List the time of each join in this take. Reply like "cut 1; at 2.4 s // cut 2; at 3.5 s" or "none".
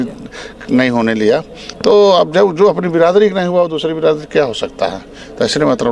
none